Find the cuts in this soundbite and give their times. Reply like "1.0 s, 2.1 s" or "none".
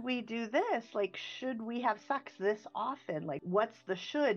3.4 s